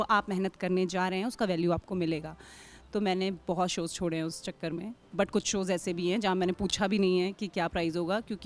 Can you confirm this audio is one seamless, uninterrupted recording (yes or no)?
yes